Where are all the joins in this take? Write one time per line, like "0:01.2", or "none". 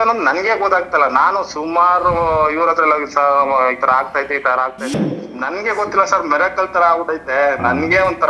0:04.8

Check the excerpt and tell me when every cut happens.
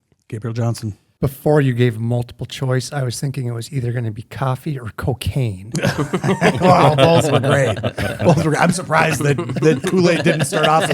0:01.0

